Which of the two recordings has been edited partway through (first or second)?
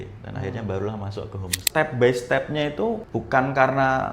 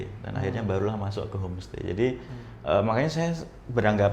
first